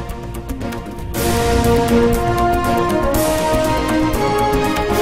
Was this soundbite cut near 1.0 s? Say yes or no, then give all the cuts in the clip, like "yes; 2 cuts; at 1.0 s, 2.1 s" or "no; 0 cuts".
yes; 1 cut; at 1.0 s